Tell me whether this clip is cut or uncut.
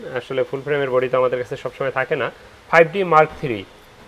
uncut